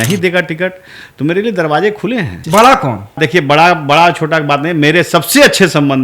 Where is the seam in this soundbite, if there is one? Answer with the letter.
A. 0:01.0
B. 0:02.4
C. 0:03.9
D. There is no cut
B